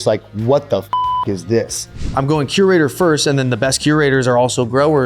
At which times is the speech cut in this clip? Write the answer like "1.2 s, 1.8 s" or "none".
2.0 s